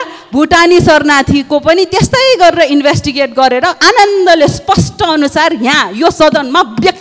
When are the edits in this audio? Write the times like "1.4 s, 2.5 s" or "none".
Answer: none